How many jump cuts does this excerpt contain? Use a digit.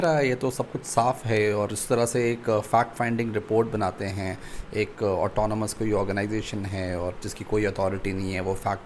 0